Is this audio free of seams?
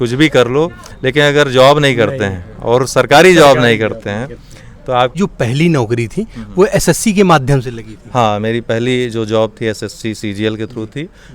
no; 1 cut; at 5.2 s

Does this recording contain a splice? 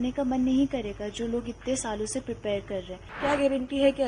yes; 1 cut; at 3.1 s

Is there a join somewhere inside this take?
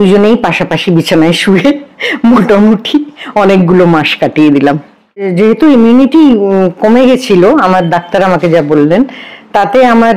yes; 1 cut; at 5.3 s

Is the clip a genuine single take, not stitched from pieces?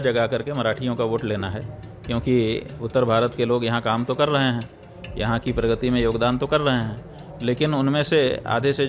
yes; 0 cuts

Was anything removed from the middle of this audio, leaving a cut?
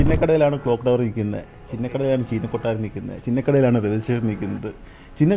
no; 0 cuts

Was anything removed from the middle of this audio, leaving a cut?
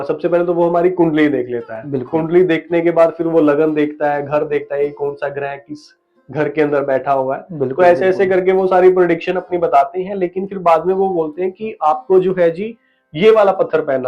no; 0 cuts

